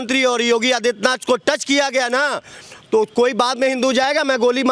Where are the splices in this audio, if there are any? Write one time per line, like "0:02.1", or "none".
none